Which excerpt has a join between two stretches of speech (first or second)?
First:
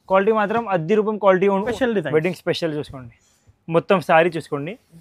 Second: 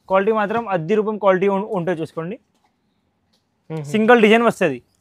first